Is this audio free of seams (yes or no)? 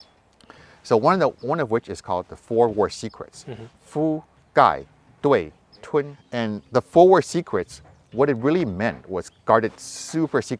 no